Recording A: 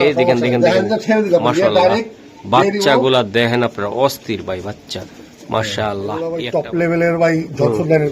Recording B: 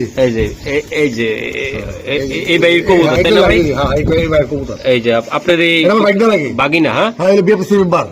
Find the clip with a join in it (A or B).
A